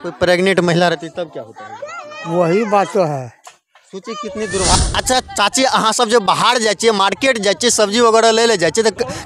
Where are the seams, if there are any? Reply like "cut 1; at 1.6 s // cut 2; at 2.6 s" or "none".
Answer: cut 1; at 4.8 s